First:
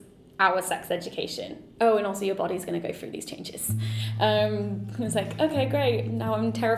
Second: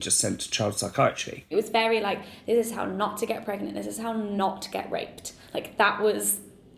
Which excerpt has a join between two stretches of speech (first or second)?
second